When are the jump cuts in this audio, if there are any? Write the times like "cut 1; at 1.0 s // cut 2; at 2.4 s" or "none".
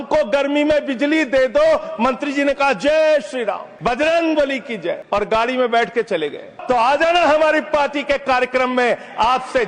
cut 1; at 3.7 s // cut 2; at 5.0 s // cut 3; at 6.5 s